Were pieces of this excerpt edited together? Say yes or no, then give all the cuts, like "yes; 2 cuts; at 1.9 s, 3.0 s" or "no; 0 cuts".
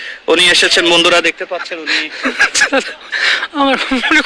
yes; 1 cut; at 2.3 s